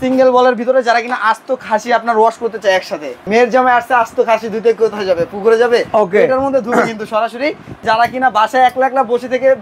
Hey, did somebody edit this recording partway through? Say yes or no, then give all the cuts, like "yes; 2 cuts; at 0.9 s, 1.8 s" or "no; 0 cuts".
yes; 2 cuts; at 3.2 s, 7.8 s